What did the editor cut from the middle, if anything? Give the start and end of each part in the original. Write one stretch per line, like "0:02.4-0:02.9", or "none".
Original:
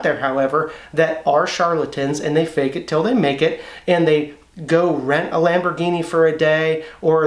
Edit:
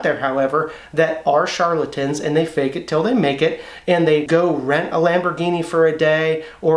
0:04.2-0:04.7